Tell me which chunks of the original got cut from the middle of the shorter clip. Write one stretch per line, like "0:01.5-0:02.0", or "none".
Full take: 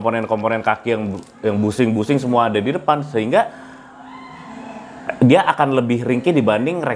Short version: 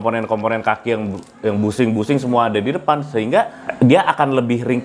0:03.6-0:05.0